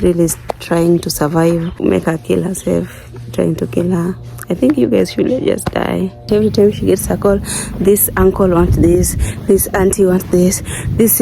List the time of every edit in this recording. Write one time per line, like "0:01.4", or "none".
0:01.8
0:06.3

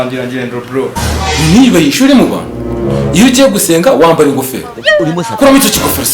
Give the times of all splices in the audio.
0:00.9

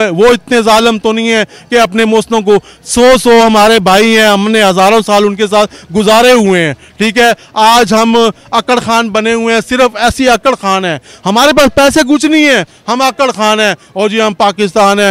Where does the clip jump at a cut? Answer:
none

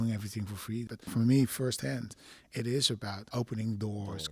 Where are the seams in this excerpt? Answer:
0:01.1
0:03.2

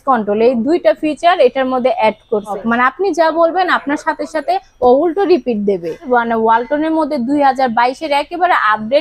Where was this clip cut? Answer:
0:02.6
0:06.0

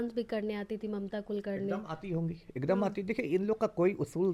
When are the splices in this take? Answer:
none

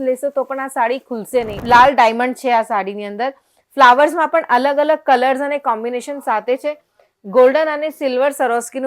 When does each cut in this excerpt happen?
0:01.6

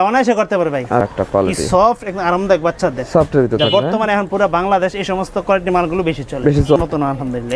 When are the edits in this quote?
0:01.0
0:06.8

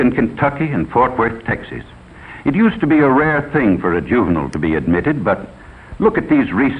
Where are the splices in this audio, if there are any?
0:05.9

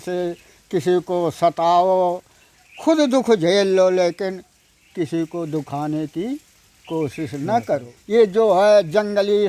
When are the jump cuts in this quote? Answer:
0:07.9

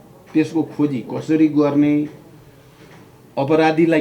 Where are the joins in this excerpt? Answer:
none

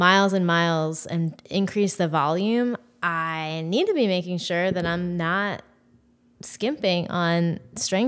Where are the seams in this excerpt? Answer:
none

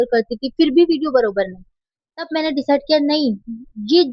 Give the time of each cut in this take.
none

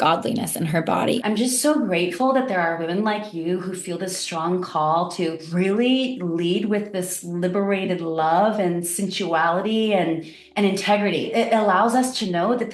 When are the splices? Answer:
0:01.2
0:05.4
0:11.3

